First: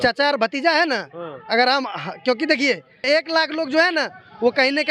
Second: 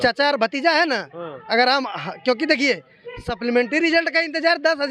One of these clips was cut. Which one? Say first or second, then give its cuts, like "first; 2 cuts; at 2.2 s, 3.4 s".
first; 1 cut; at 3.1 s